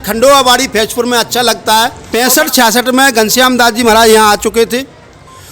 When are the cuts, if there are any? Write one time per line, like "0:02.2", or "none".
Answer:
0:02.0

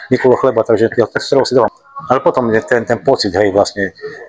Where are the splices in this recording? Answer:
0:01.7

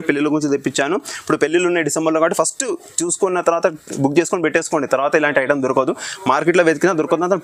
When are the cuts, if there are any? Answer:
none

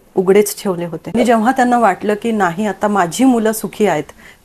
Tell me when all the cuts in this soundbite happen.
0:01.1

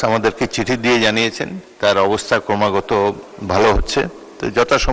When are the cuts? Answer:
none

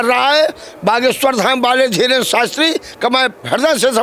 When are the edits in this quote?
none

